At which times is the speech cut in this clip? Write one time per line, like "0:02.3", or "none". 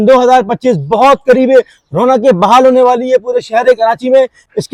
none